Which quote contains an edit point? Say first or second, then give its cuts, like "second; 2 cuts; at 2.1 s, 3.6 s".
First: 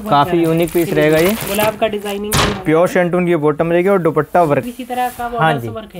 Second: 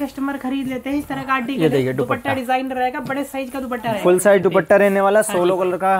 first; 1 cut; at 4.7 s